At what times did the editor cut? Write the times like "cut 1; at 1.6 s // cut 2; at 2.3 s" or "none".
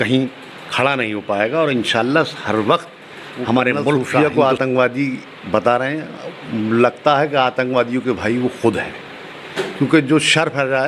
cut 1; at 4.1 s